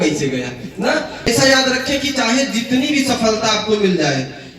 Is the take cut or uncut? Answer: cut